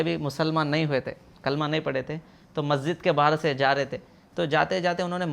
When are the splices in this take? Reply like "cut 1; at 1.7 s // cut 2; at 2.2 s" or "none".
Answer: none